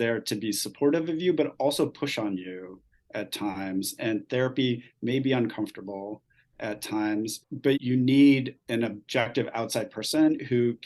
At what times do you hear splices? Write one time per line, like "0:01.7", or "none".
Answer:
0:07.8
0:09.3

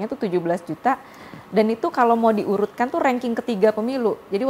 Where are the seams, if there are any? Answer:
none

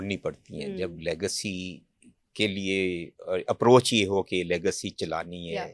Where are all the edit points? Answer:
none

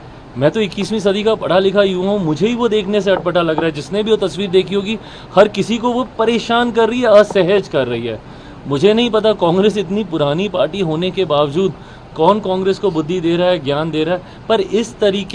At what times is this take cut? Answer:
none

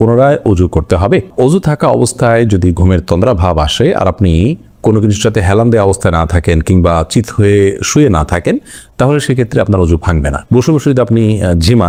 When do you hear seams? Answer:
none

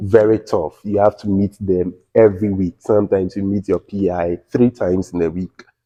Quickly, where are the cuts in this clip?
none

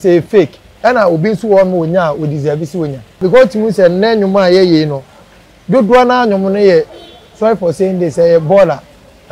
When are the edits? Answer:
0:03.2

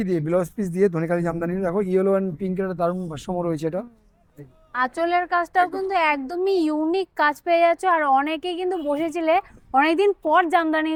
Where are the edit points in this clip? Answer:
none

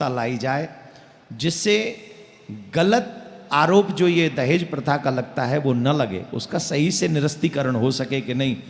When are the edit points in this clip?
none

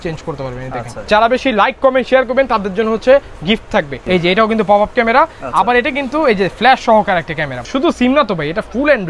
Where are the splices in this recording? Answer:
0:01.0
0:04.0
0:07.6

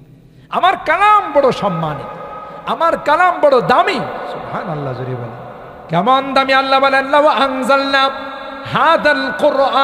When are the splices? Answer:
0:05.7

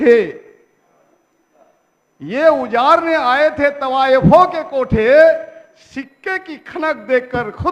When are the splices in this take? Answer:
none

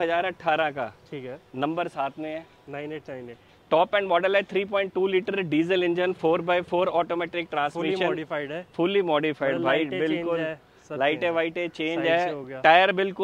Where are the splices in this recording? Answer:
none

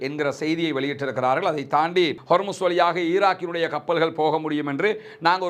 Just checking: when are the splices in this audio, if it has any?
0:02.2

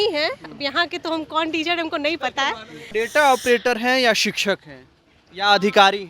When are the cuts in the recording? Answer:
0:02.9

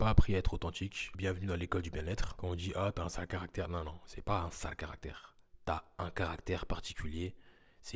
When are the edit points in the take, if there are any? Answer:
0:01.0
0:02.3

